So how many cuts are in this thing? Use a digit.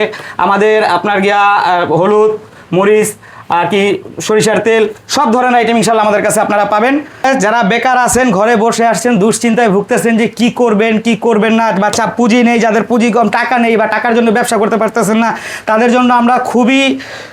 1